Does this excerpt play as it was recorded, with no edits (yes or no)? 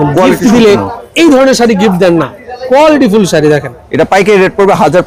yes